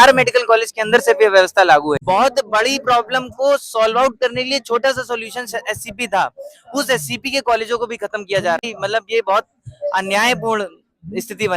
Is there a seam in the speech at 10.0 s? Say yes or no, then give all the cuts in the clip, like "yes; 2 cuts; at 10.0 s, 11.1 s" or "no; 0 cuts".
no; 2 cuts; at 2.0 s, 8.6 s